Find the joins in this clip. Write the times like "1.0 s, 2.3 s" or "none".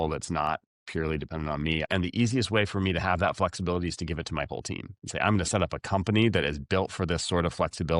1.9 s